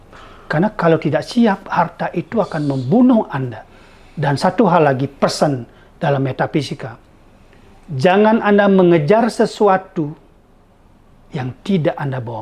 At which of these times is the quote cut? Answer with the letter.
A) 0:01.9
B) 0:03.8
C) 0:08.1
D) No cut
D